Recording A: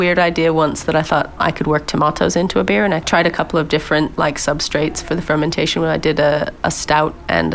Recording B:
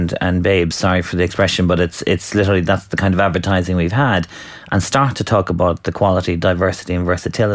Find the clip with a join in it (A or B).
A